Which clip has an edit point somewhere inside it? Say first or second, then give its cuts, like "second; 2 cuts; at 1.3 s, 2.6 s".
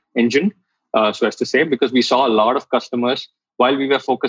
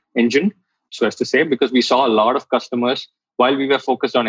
second; 1 cut; at 0.9 s